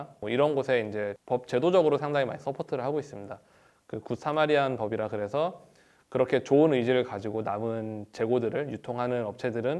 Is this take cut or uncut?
cut